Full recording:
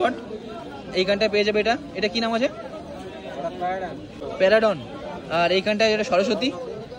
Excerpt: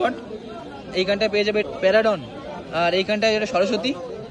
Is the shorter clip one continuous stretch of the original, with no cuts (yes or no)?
no